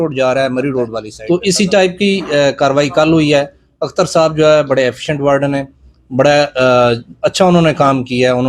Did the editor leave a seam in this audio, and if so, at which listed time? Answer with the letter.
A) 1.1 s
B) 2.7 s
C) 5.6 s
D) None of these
A